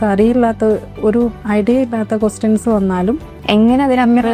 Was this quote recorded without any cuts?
no; 1 cut; at 3.3 s

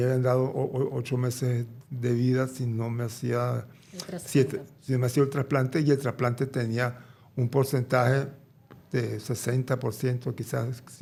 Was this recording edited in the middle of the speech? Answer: no; 0 cuts

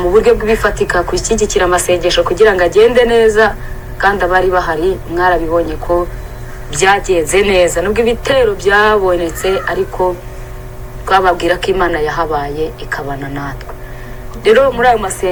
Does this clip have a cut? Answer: no; 0 cuts

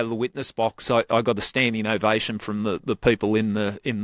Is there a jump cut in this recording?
no; 0 cuts

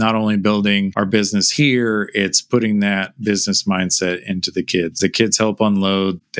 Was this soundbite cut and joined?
yes; 2 cuts; at 0.9 s, 4.9 s

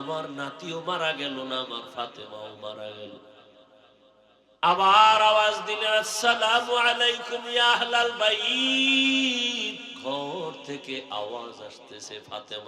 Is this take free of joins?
no; 1 cut; at 9.9 s

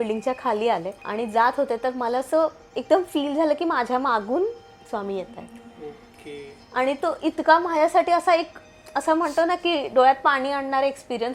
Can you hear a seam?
yes; 1 cut; at 1.0 s

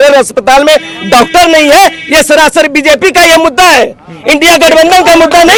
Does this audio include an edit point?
no; 0 cuts

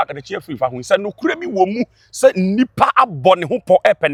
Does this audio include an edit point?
no; 0 cuts

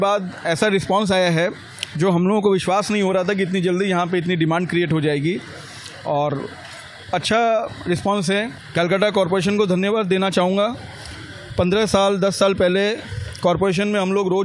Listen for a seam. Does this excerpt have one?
yes; 1 cut; at 8.5 s

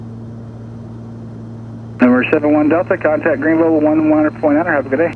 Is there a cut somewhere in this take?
yes; 1 cut; at 1.9 s

